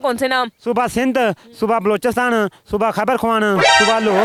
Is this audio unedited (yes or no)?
yes